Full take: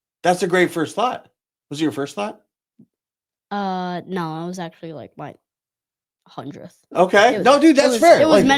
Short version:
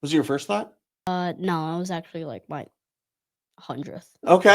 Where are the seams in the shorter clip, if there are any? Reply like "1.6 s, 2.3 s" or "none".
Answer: 1.1 s

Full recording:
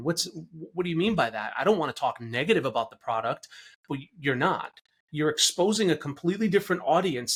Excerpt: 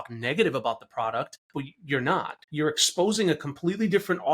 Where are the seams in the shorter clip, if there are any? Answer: 1.4 s, 2.4 s

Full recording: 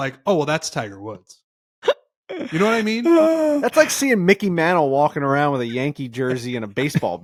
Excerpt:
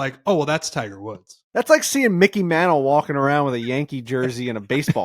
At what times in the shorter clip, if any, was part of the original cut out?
1.5 s

